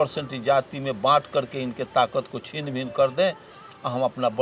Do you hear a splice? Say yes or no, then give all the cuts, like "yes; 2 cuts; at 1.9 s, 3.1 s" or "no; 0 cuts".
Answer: no; 0 cuts